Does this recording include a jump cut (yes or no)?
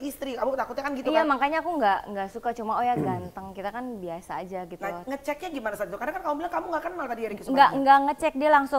no